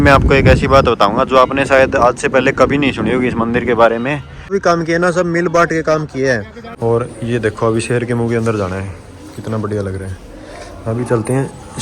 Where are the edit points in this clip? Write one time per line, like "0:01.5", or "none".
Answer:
0:04.5
0:06.6